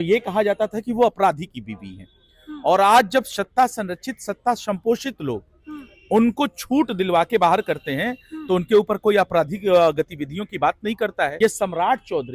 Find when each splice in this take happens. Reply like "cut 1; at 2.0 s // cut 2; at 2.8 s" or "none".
cut 1; at 11.3 s